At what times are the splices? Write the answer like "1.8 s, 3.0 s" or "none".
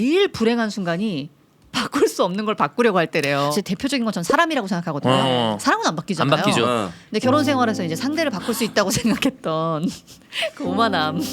3.5 s